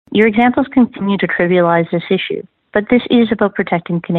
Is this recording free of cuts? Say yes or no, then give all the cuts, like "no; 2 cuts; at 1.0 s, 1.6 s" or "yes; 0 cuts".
no; 1 cut; at 0.9 s